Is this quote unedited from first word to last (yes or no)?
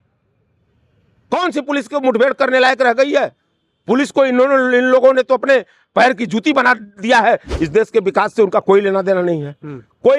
no